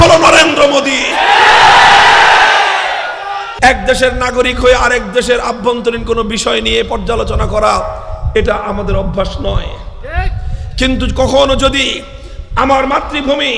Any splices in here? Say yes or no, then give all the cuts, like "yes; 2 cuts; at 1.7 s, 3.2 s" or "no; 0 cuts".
yes; 1 cut; at 3.5 s